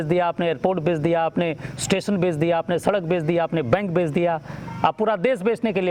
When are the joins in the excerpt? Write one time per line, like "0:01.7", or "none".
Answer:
none